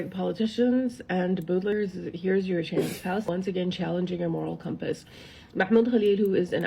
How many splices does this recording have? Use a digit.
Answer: 2